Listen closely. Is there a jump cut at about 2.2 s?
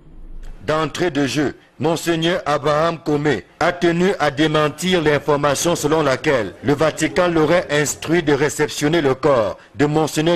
yes; 1 cut; at 2.2 s

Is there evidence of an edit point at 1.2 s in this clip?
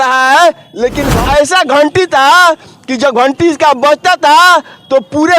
yes; 1 cut; at 1.2 s

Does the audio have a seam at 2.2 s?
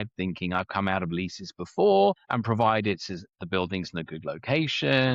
yes; 1 cut; at 2.2 s

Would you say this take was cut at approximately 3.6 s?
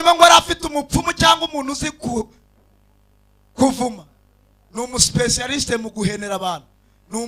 no; 0 cuts

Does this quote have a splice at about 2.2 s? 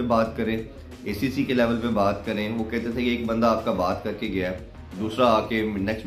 no; 0 cuts

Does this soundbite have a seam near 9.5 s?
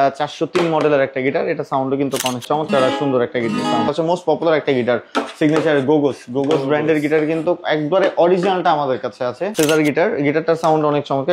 yes; 3 cuts; at 2.4 s, 3.9 s, 9.5 s

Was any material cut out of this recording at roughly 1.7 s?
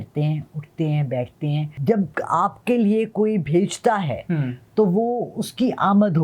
yes; 1 cut; at 1.7 s

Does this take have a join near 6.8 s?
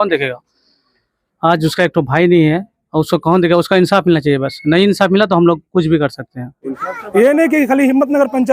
yes; 1 cut; at 6.8 s

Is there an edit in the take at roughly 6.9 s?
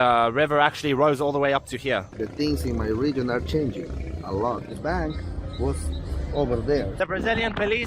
yes; 3 cuts; at 2.1 s, 4.7 s, 6.9 s

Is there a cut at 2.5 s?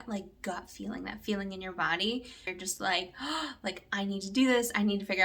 yes; 1 cut; at 2.5 s

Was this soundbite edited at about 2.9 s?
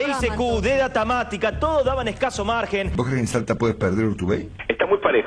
yes; 1 cut; at 2.9 s

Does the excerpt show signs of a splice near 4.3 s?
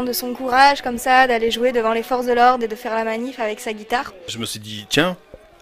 yes; 1 cut; at 4.3 s

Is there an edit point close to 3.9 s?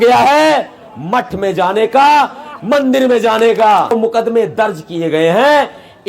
yes; 1 cut; at 3.9 s

